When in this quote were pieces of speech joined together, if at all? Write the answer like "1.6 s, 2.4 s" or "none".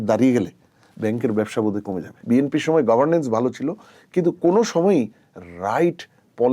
2.2 s